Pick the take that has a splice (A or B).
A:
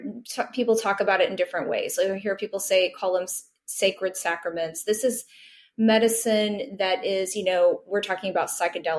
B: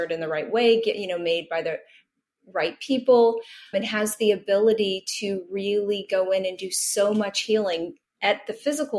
B